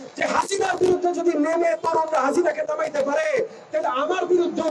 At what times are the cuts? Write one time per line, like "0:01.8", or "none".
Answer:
none